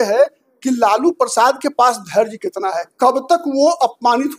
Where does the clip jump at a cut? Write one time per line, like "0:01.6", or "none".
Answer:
none